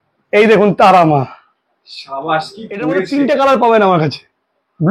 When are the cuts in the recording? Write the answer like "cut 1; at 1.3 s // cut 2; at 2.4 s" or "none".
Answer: cut 1; at 3.0 s